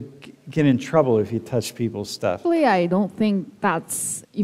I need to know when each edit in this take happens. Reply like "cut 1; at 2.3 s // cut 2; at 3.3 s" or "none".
cut 1; at 2.4 s